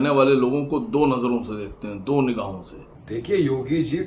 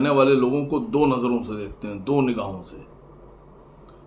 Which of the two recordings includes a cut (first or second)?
first